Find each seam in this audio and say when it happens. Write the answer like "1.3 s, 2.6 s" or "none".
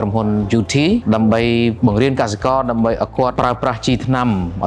1.0 s, 1.8 s, 3.3 s